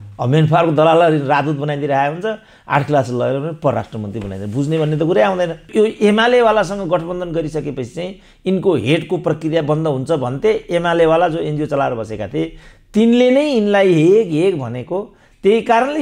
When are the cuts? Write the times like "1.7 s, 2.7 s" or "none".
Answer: 5.7 s